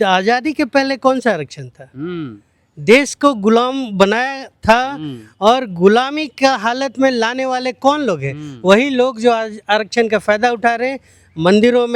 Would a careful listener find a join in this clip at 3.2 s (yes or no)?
no